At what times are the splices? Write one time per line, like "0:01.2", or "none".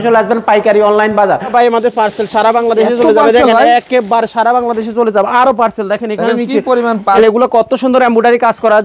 0:01.5
0:07.2